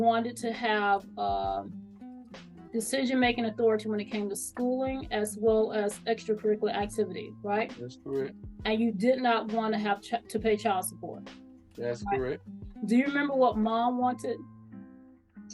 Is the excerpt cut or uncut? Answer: uncut